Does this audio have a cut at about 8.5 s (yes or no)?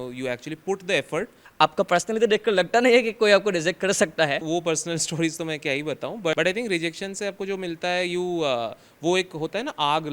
no